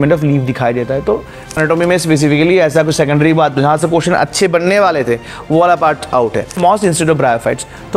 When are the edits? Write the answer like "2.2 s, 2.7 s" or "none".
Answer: 1.6 s, 6.6 s